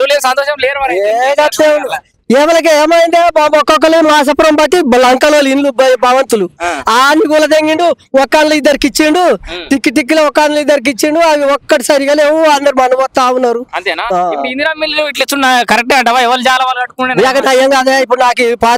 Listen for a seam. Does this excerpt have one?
no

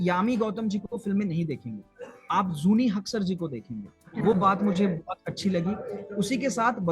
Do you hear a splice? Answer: no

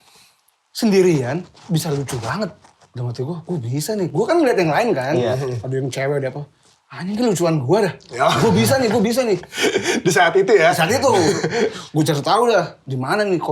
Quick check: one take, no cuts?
yes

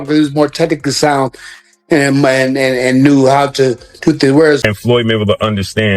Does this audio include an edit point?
yes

